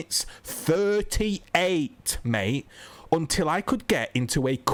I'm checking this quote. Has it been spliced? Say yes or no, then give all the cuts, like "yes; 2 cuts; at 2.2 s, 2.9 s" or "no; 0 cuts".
no; 0 cuts